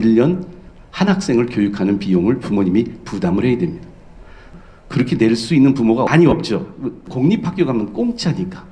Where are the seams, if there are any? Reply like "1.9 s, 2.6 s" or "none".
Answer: 4.5 s, 6.1 s, 7.1 s